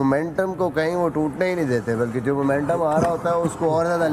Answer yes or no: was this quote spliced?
no